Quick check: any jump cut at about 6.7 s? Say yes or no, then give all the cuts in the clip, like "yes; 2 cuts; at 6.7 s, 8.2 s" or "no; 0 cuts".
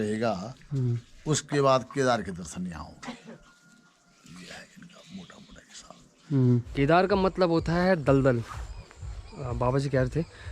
yes; 1 cut; at 6.7 s